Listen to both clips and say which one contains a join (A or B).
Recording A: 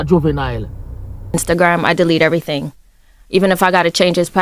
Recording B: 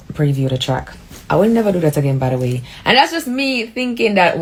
A